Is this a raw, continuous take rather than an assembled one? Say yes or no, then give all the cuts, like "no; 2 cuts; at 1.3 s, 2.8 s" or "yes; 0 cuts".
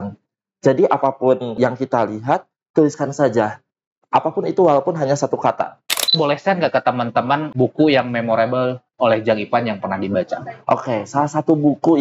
no; 4 cuts; at 1.5 s, 6.1 s, 7.5 s, 8.8 s